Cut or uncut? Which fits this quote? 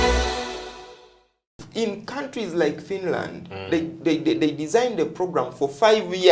cut